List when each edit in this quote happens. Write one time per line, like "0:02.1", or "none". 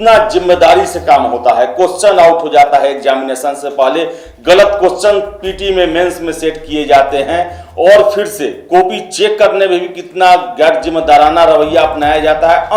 none